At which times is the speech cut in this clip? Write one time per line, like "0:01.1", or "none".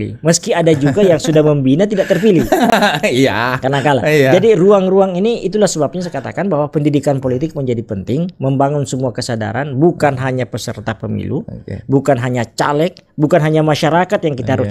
none